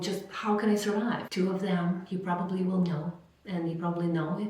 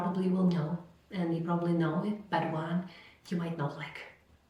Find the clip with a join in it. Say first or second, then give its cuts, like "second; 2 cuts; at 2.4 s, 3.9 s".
first; 1 cut; at 1.2 s